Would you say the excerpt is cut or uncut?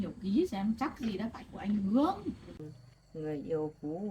cut